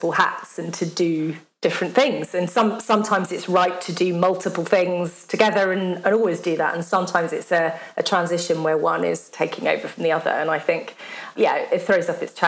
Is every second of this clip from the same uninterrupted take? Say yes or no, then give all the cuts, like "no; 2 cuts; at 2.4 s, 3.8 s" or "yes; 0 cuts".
yes; 0 cuts